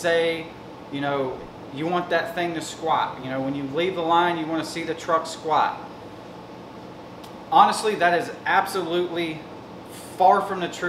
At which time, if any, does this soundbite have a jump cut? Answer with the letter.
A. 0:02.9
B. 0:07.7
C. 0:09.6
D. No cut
D